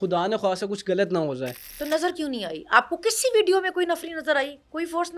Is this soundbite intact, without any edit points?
yes; 0 cuts

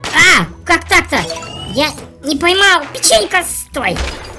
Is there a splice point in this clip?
no; 0 cuts

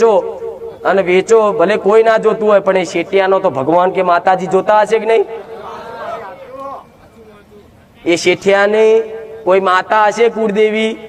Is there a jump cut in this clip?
no; 0 cuts

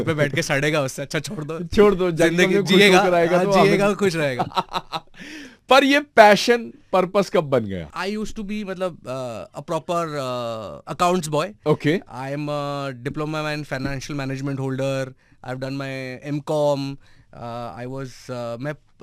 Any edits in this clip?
no; 0 cuts

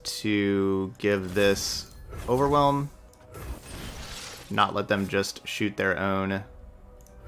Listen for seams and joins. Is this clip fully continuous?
no; 1 cut; at 3.1 s

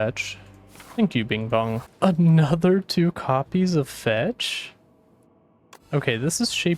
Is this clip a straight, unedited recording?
no; 1 cut; at 1.9 s

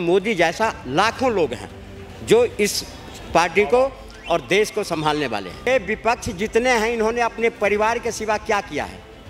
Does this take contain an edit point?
yes; 1 cut; at 5.7 s

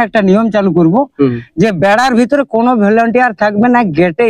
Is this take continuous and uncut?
yes; 0 cuts

